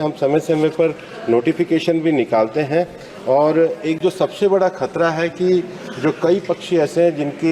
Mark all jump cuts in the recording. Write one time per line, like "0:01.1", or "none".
none